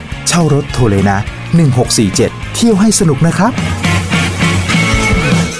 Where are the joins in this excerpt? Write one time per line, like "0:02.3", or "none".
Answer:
none